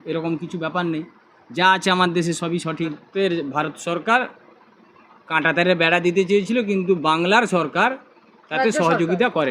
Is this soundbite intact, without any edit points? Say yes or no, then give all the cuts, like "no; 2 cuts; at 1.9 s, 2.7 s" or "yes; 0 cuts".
no; 1 cut; at 3.0 s